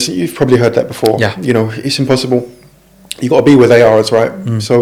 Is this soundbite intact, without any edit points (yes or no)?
yes